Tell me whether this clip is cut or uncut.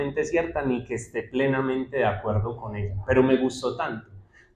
uncut